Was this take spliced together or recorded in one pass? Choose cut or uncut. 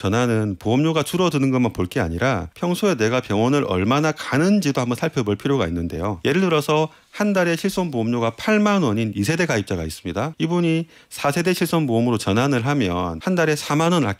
cut